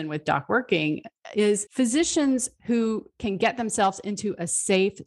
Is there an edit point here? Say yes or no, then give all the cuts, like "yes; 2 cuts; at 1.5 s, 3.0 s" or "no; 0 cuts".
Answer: yes; 1 cut; at 1.7 s